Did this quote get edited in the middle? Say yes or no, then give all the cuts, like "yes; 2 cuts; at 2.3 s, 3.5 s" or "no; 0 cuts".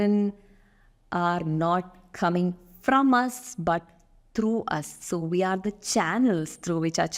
no; 0 cuts